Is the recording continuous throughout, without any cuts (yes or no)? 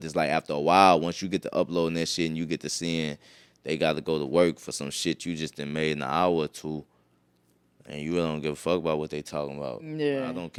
yes